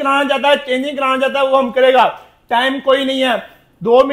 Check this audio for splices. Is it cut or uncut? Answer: uncut